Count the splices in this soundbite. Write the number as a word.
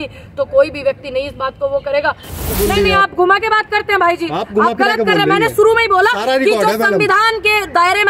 one